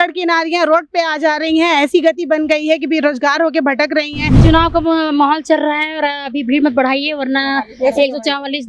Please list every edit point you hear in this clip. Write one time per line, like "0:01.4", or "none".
0:04.4